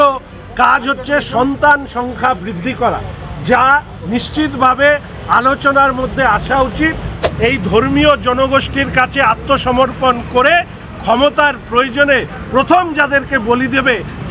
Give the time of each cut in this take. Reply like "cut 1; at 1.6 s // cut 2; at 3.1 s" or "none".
cut 1; at 7.2 s